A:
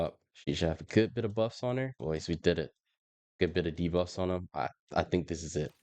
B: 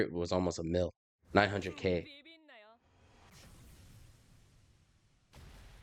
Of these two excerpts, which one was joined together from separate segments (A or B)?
A